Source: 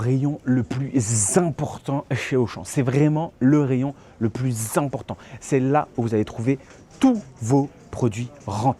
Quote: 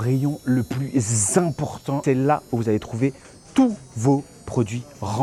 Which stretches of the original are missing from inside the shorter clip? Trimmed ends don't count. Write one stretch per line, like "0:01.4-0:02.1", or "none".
0:02.0-0:05.5